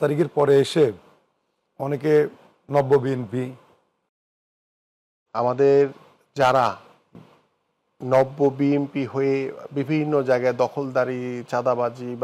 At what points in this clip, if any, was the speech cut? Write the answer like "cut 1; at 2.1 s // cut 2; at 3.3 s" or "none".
cut 1; at 4.7 s